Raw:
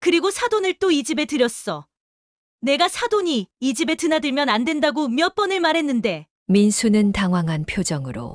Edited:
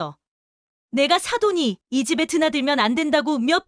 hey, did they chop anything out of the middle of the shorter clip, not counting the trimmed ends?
no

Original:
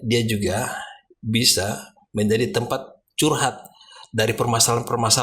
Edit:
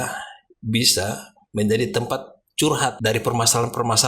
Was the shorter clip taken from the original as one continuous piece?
no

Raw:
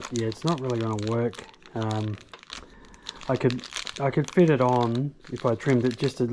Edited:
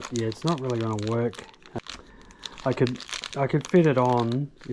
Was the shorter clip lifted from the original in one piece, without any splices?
no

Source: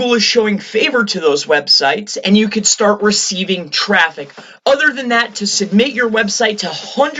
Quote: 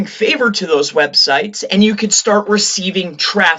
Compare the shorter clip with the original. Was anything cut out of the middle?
no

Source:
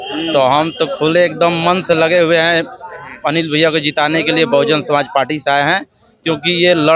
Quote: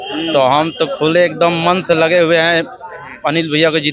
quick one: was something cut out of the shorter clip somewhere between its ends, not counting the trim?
no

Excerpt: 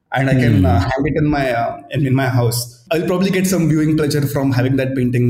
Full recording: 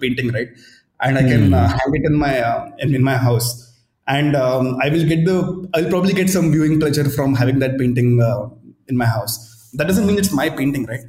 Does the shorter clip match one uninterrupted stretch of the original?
no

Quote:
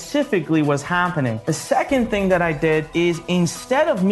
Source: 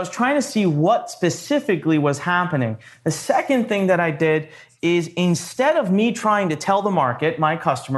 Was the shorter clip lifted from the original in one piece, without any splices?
no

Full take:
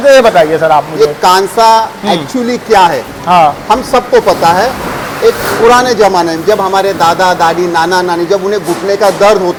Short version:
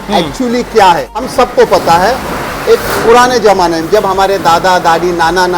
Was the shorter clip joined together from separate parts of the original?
yes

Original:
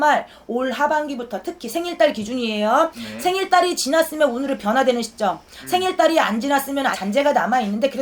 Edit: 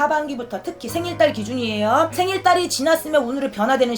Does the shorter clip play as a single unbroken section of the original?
no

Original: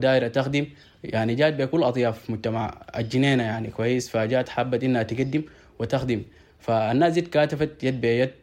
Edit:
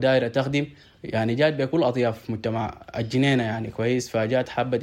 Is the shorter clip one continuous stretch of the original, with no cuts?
yes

